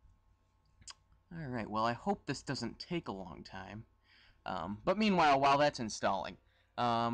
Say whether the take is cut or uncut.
uncut